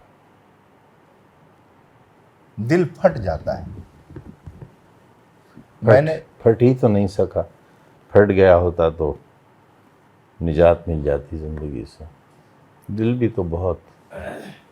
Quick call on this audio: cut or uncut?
cut